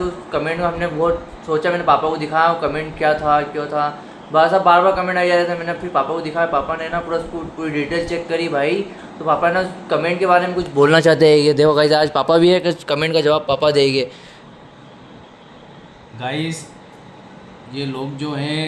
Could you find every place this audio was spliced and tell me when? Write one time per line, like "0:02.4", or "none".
none